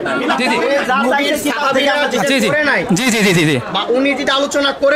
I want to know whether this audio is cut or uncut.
uncut